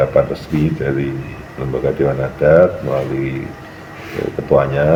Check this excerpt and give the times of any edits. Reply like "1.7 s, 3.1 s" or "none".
none